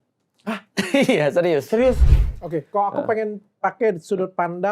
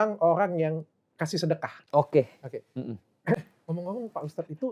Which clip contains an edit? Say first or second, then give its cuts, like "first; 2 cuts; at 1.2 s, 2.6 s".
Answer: first; 1 cut; at 2.1 s